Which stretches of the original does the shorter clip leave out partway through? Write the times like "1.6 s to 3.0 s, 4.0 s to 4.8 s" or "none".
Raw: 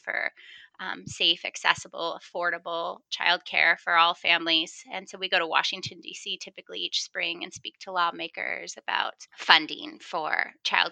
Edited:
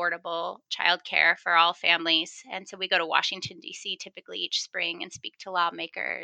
none

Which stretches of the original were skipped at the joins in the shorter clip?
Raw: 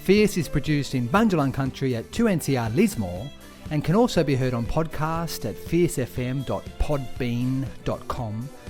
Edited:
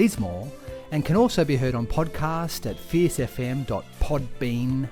none

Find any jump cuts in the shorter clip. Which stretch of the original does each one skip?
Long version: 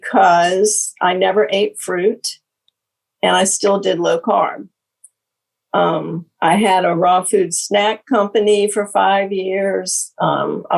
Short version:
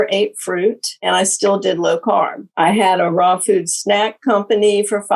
2.3 s to 3.1 s, 4.6 s to 6.3 s

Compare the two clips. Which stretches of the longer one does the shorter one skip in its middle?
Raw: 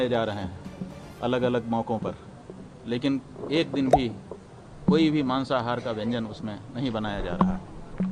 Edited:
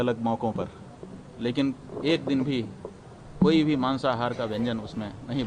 none

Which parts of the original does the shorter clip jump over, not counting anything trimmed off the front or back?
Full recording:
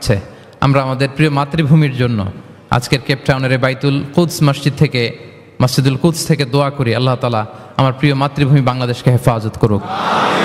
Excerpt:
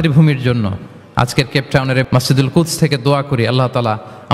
3.6 s to 5.5 s

